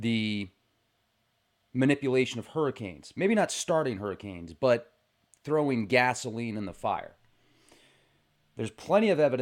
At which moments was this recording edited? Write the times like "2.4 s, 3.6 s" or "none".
6.0 s